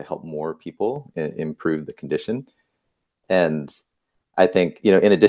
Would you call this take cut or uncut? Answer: uncut